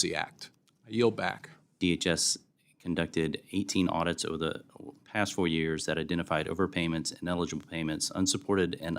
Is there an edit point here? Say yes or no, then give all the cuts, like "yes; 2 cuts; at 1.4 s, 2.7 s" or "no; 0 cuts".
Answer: yes; 1 cut; at 1.7 s